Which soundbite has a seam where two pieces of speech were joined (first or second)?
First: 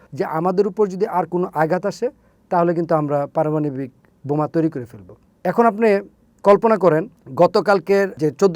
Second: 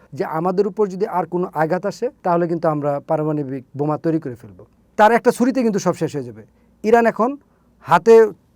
second